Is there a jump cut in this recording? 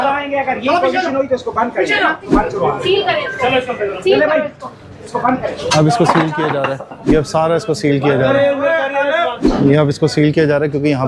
yes; 3 cuts; at 2.2 s, 7.0 s, 9.4 s

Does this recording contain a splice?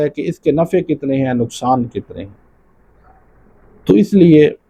no; 0 cuts

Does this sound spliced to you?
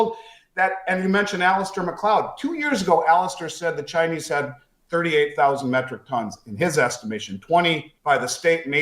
yes; 1 cut; at 7.9 s

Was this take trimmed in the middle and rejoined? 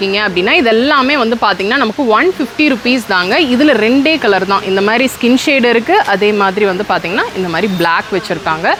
no; 0 cuts

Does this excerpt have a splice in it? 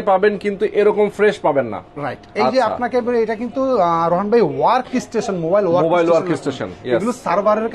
no; 0 cuts

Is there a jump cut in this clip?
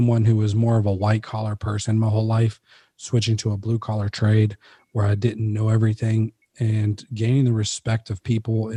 no; 0 cuts

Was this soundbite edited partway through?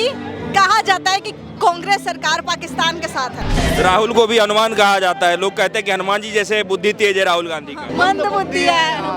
yes; 2 cuts; at 3.5 s, 7.8 s

